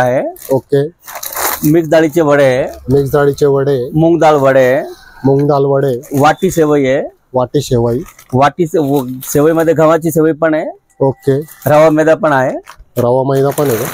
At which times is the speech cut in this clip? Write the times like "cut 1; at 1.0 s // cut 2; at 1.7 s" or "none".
none